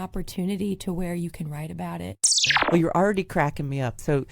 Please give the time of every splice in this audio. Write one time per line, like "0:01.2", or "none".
0:02.5